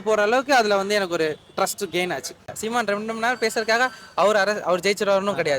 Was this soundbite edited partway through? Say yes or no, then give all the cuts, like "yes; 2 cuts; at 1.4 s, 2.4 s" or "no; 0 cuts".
yes; 1 cut; at 2.6 s